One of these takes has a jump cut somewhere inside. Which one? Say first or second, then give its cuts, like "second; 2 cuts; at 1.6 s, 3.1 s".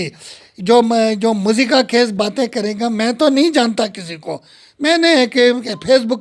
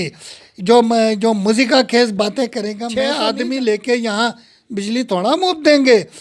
second; 1 cut; at 2.8 s